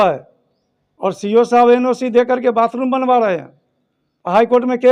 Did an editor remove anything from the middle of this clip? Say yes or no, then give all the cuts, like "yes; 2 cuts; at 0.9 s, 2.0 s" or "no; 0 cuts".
no; 0 cuts